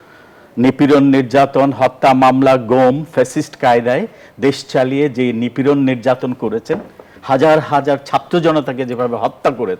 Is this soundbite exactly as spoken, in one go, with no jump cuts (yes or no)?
yes